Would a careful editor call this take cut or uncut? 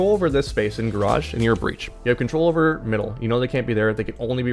uncut